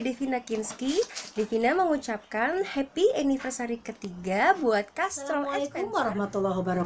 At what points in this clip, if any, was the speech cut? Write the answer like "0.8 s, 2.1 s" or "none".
5.3 s